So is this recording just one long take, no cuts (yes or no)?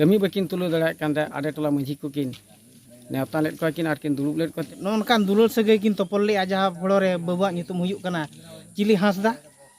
no